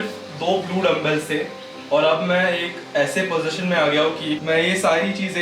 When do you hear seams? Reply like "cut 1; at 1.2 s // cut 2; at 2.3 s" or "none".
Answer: cut 1; at 4.4 s